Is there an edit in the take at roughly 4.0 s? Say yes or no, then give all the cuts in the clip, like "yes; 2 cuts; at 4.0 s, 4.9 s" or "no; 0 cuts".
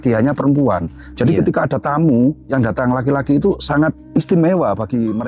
yes; 2 cuts; at 2.4 s, 4.0 s